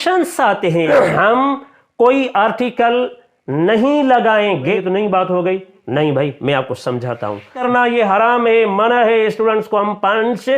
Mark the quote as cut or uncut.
cut